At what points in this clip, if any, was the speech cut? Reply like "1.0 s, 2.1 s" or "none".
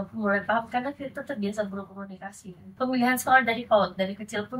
2.6 s